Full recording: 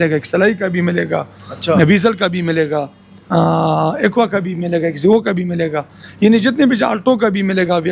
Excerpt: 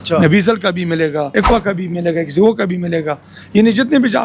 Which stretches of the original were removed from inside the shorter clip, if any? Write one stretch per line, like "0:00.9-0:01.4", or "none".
0:02.9-0:04.0